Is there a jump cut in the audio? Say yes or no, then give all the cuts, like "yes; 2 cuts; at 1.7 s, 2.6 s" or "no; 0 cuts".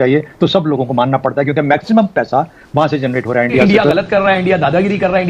yes; 1 cut; at 3.6 s